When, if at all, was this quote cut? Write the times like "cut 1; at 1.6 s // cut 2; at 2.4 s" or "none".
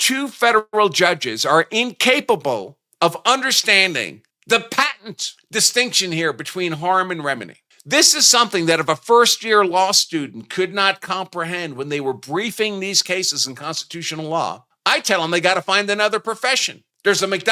none